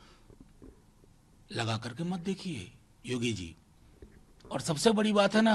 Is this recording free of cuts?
yes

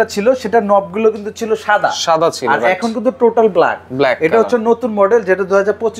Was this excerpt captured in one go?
yes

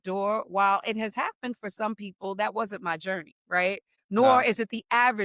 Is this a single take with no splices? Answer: no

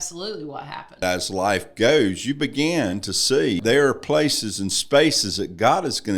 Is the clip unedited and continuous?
no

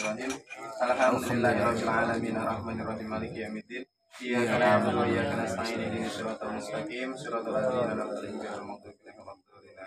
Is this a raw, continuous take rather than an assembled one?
yes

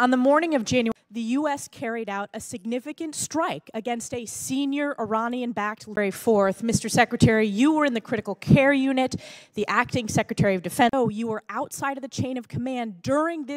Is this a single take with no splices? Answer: yes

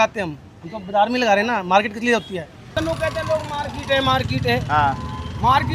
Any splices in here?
yes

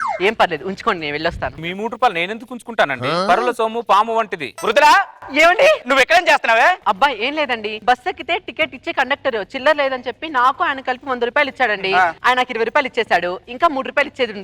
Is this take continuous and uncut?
no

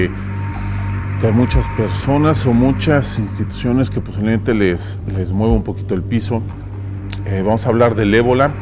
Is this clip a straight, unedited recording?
yes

